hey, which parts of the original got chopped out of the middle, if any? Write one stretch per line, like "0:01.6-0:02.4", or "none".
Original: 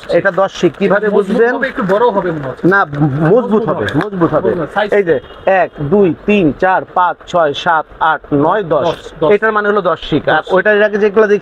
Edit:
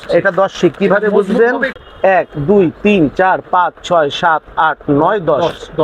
0:01.8-0:05.2